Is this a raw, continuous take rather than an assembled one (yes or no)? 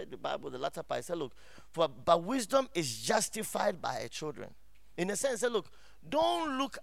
yes